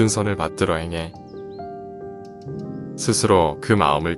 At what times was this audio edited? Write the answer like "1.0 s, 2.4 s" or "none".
1.1 s, 2.4 s